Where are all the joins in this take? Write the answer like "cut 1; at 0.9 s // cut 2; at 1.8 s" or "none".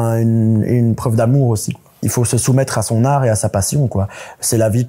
cut 1; at 2.0 s